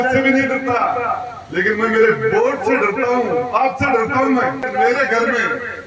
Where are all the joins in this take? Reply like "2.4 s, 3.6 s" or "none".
4.7 s

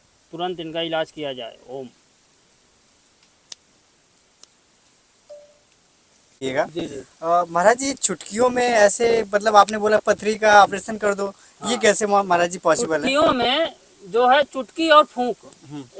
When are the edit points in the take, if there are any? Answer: 6.4 s

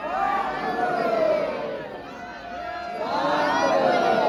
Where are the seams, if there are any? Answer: none

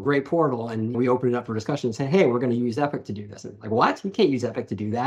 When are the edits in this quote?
none

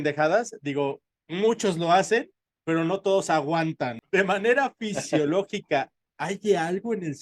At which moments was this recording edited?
3.9 s

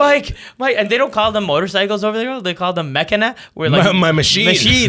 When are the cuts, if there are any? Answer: none

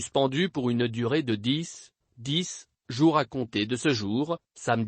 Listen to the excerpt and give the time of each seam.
3.4 s

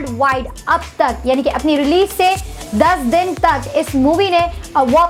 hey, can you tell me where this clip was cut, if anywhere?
none

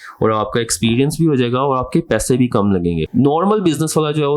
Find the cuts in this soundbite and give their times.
3.0 s

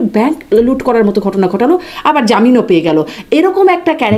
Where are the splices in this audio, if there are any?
none

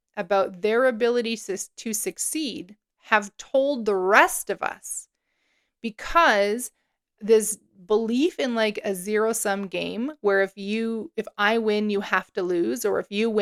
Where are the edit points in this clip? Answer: none

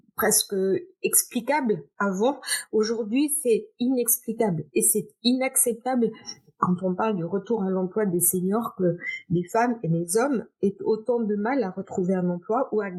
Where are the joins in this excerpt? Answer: none

